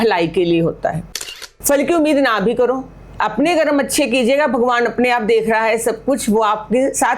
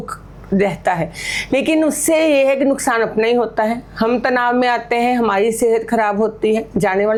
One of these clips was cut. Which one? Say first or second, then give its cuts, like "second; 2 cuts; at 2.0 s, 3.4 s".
first; 1 cut; at 1.1 s